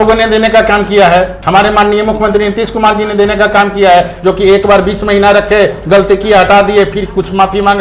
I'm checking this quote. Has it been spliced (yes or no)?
no